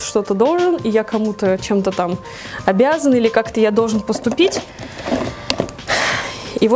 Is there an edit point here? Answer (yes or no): no